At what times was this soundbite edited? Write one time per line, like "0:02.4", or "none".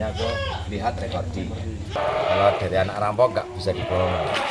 0:01.9